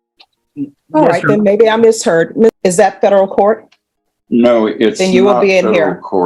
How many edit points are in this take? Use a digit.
1